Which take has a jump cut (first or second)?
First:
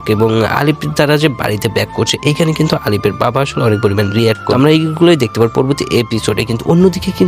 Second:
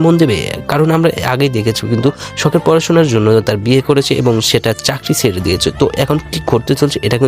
first